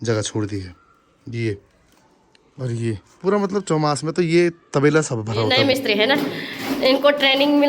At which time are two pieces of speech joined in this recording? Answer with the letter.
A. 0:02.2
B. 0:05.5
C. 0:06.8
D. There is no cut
B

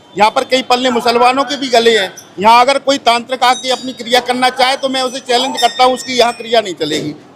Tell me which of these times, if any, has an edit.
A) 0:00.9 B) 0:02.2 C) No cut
B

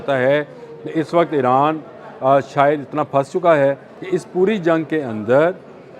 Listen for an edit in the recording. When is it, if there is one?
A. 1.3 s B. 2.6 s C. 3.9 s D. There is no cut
C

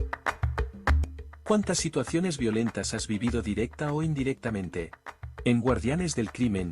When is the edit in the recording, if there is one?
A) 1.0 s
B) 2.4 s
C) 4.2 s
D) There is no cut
A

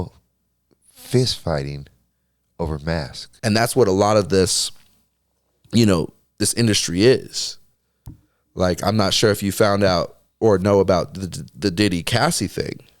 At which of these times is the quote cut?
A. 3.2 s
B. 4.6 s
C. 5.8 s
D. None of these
A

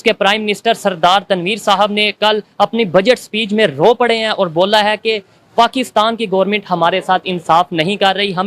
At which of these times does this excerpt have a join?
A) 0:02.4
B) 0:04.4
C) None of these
C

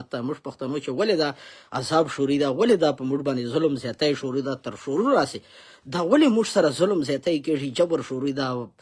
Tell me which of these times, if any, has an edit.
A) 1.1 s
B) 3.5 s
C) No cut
C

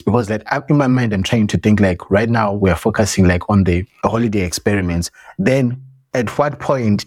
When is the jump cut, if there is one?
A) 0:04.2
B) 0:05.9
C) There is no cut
C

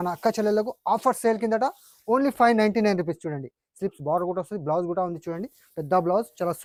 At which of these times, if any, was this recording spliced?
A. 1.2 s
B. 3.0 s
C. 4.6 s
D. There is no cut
D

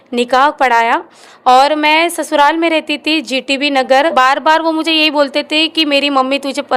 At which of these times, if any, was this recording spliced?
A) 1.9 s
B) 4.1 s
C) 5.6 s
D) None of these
B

